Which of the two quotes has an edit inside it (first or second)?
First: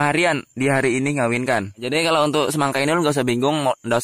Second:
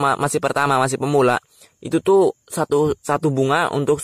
first